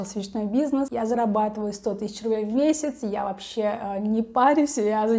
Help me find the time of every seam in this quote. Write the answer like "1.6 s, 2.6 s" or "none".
0.9 s